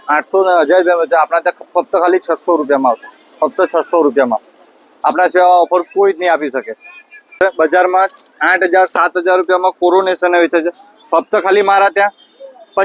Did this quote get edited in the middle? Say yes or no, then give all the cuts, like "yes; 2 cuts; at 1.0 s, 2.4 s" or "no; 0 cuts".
no; 0 cuts